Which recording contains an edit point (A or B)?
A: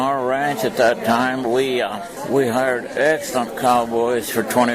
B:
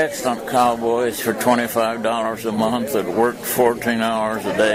A